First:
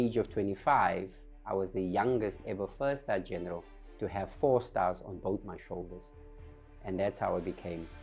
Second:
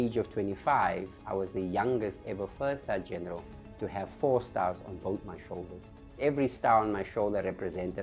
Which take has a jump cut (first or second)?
second